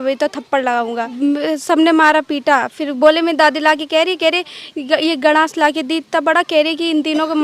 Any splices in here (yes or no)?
yes